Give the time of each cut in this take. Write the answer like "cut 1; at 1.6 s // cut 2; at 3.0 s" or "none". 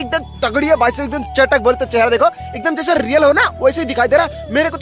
none